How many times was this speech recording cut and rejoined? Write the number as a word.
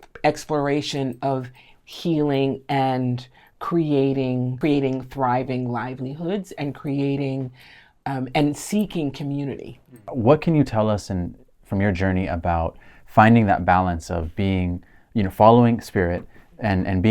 two